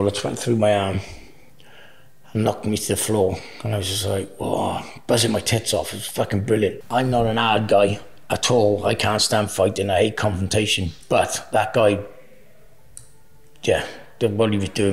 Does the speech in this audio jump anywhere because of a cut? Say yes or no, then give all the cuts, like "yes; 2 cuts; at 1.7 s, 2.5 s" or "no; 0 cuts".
yes; 1 cut; at 6.8 s